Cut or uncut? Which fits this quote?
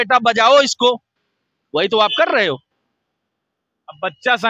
uncut